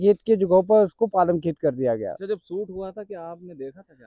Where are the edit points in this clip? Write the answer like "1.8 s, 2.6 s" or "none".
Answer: 2.2 s